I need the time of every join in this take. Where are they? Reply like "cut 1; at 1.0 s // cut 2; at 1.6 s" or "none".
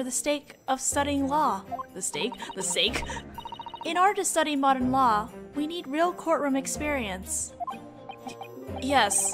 cut 1; at 3.2 s